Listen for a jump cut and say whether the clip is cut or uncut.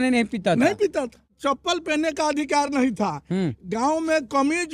cut